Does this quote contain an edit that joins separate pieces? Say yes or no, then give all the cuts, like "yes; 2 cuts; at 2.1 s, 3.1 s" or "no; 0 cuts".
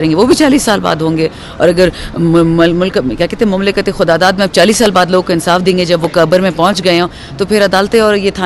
no; 0 cuts